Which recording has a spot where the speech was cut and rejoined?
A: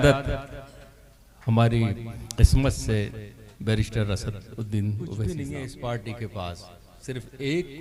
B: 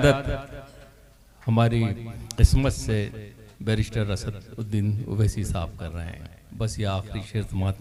A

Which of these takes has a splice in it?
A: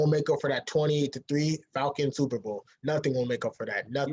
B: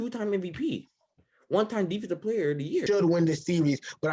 B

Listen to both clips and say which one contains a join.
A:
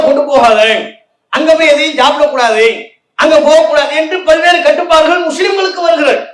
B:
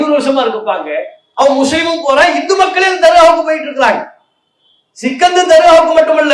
B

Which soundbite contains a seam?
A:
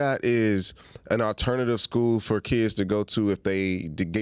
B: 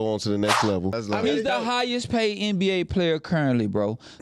B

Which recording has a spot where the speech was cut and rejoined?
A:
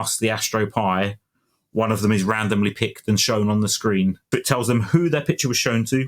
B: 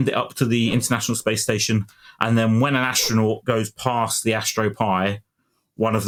A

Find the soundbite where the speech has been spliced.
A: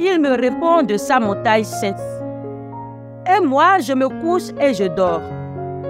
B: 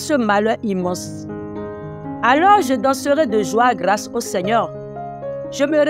B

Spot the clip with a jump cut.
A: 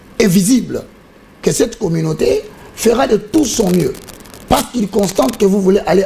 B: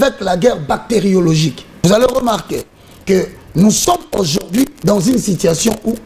B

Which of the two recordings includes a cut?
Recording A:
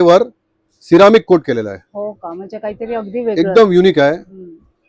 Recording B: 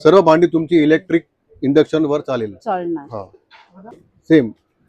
B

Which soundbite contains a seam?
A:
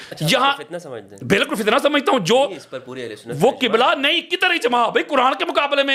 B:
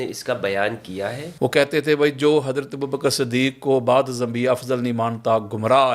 B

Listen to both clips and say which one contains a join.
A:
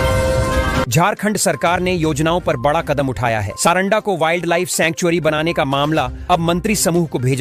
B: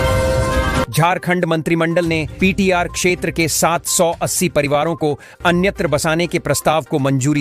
A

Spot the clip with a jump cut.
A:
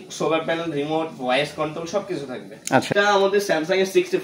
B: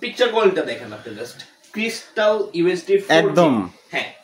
A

